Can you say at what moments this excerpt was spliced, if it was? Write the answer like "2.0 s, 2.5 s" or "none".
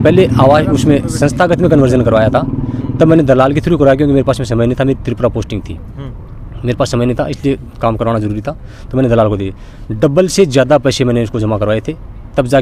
none